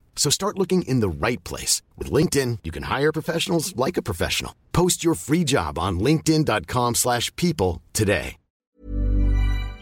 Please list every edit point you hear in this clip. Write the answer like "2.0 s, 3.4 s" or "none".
8.5 s